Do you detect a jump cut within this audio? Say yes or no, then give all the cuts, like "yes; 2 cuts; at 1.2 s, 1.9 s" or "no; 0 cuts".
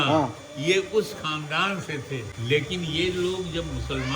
yes; 1 cut; at 2.3 s